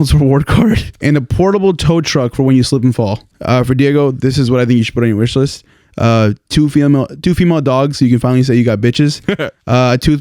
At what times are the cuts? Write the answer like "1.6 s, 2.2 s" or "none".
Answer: 0.9 s, 3.3 s